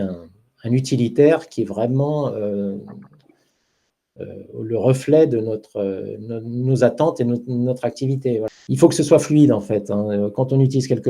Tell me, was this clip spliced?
yes; 1 cut; at 8.5 s

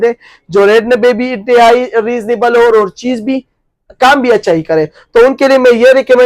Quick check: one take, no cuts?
yes; 0 cuts

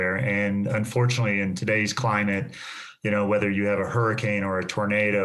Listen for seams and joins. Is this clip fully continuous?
yes; 0 cuts

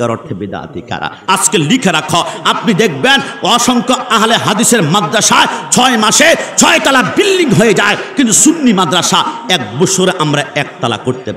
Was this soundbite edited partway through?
yes; 1 cut; at 1.2 s

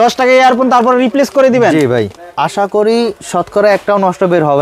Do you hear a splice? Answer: no; 0 cuts

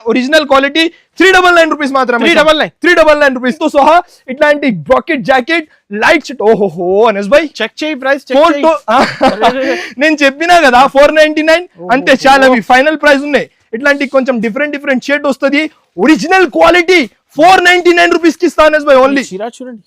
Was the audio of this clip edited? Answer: yes; 1 cut; at 3.6 s

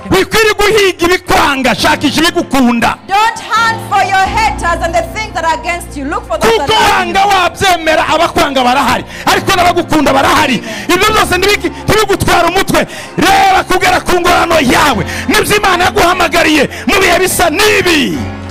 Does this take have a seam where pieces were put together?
no; 0 cuts

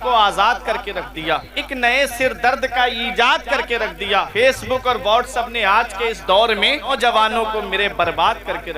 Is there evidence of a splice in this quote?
yes; 3 cuts; at 1.6 s, 4.3 s, 7.0 s

